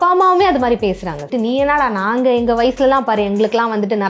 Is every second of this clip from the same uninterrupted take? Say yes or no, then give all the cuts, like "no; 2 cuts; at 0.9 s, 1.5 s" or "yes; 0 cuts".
no; 1 cut; at 1.3 s